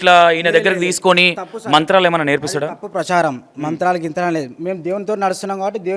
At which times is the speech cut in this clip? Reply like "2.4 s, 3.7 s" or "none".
none